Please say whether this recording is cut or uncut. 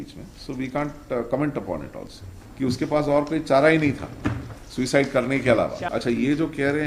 cut